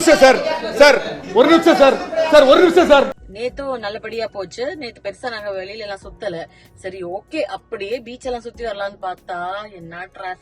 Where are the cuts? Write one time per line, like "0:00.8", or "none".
0:03.2